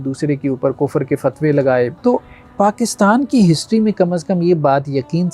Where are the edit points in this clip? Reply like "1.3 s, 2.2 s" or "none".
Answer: 1.9 s